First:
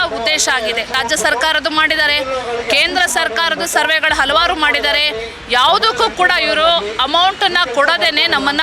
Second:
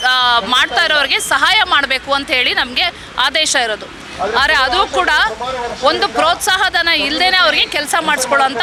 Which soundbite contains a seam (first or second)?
first